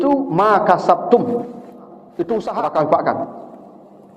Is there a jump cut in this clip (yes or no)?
yes